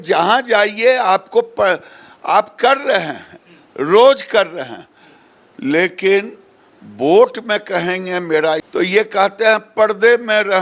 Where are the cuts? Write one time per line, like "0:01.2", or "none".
0:08.7